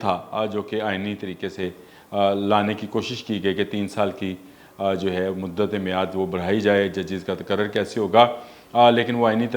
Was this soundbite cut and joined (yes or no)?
no